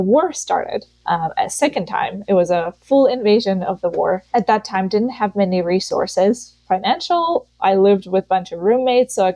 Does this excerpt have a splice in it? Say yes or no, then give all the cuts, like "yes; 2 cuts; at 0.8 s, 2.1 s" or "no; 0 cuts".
yes; 2 cuts; at 1.0 s, 4.3 s